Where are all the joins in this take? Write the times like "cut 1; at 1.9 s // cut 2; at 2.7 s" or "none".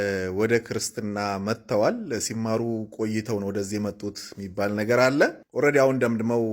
cut 1; at 5.4 s

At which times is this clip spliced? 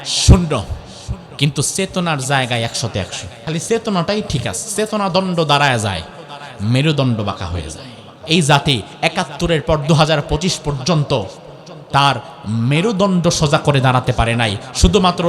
cut 1; at 3.3 s // cut 2; at 8.2 s

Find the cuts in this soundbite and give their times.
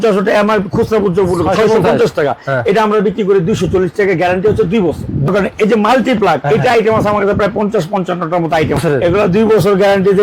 cut 1; at 5.3 s // cut 2; at 8.8 s

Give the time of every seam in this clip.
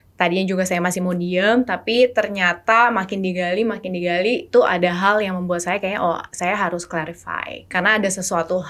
cut 1; at 7.7 s

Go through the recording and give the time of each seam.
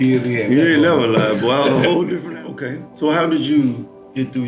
cut 1; at 2.2 s

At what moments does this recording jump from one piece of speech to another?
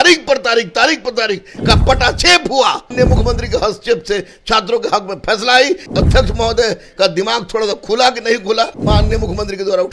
cut 1; at 2.9 s // cut 2; at 5.8 s // cut 3; at 8.8 s

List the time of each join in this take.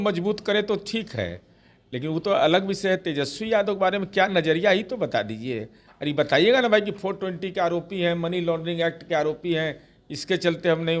none

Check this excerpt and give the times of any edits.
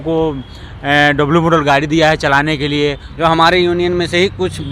cut 1; at 3.1 s

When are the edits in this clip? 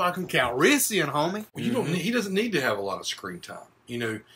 cut 1; at 1.5 s

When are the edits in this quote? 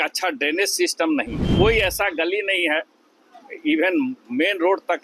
cut 1; at 1.4 s

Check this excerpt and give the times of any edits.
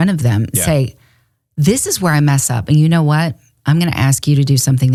none

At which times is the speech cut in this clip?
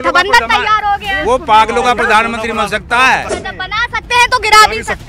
cut 1; at 3.4 s

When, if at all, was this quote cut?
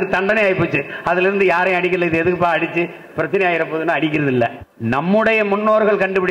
cut 1; at 4.7 s

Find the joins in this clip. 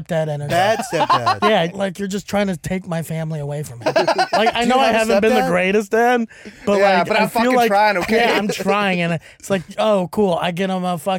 cut 1; at 1.7 s // cut 2; at 3.8 s // cut 3; at 9.7 s

